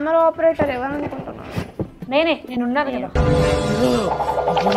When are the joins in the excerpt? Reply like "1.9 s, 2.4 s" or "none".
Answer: none